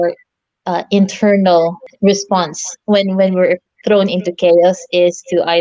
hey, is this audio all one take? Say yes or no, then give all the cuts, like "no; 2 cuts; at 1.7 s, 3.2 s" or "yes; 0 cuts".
no; 1 cut; at 1.9 s